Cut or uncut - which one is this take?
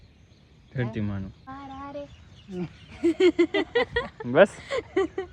cut